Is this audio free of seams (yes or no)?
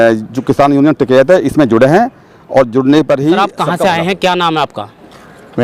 yes